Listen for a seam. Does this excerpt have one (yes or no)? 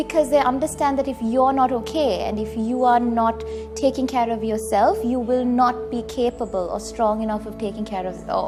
no